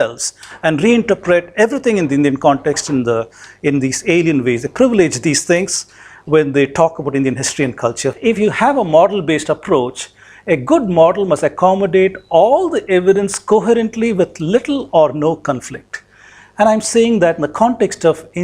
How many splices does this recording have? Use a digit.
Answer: 1